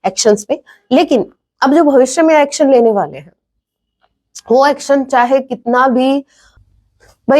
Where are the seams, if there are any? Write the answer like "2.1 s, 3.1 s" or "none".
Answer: 6.4 s